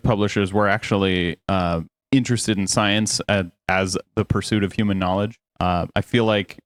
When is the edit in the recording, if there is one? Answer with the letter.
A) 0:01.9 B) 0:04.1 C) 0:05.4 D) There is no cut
D